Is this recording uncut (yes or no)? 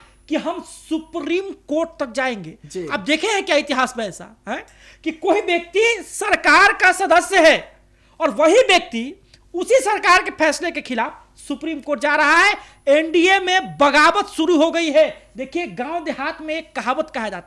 yes